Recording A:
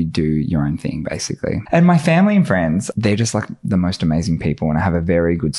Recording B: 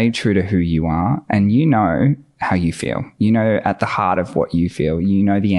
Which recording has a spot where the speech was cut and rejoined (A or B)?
A